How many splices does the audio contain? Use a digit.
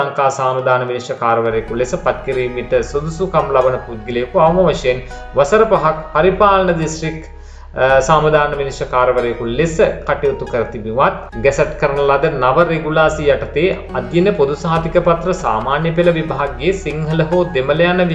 1